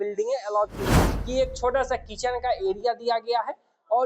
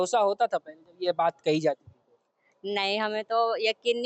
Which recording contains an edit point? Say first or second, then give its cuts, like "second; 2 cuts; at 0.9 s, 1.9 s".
first; 1 cut; at 1.0 s